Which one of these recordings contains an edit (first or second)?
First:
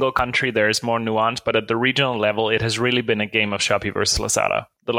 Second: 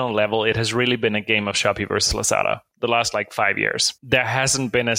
second